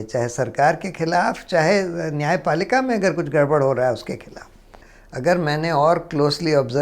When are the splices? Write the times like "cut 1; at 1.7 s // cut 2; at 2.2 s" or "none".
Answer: cut 1; at 4.8 s